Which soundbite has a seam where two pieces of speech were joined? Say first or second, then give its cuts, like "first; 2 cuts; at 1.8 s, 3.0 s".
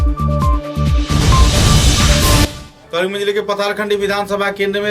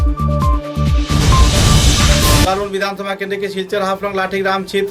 second; 1 cut; at 2.4 s